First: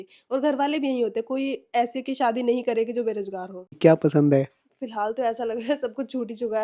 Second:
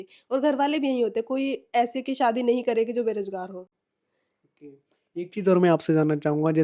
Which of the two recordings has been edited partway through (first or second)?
first